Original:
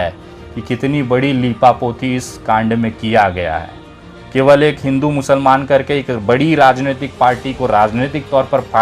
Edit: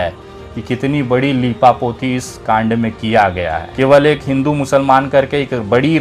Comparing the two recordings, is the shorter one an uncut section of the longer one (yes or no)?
no